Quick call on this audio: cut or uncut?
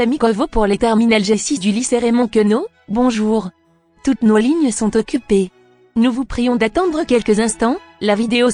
uncut